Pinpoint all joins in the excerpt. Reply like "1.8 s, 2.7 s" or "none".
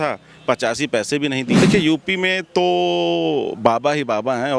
1.6 s